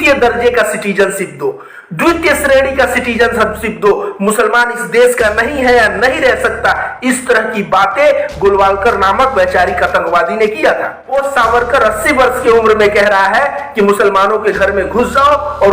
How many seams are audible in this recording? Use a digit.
1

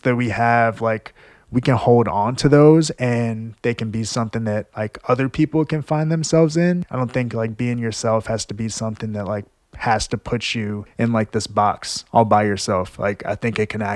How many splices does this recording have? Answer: 2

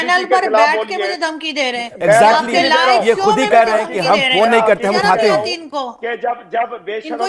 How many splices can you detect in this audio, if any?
0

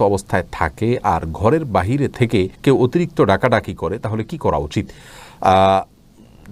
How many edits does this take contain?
0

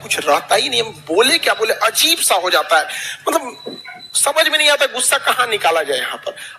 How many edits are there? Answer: 0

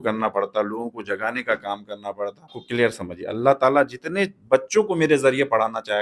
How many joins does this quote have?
1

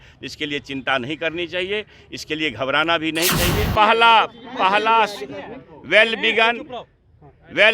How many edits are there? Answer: 1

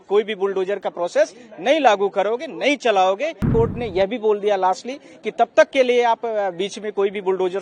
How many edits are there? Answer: 1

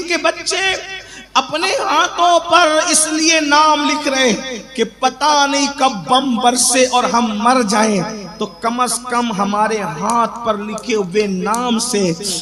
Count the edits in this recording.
0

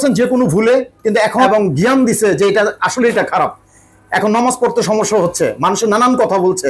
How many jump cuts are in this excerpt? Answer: 1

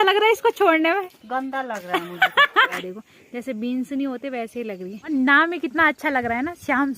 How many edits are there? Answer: 2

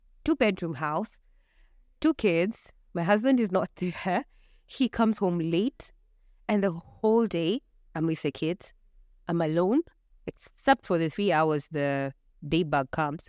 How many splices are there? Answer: 0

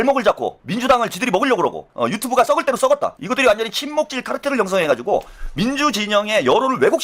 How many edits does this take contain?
1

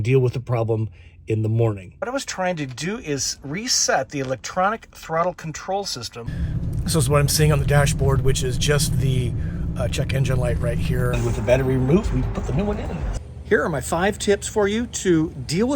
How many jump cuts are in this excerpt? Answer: 4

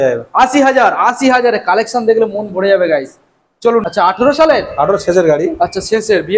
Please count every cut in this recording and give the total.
1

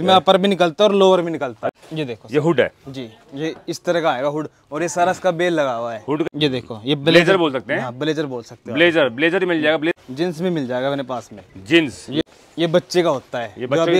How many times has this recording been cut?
4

